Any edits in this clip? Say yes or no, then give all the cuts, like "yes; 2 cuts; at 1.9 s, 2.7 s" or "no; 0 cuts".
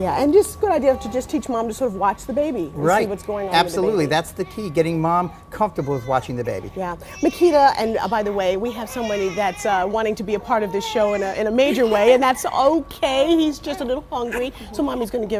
yes; 1 cut; at 7.4 s